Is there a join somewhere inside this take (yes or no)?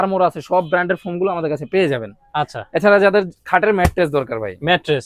no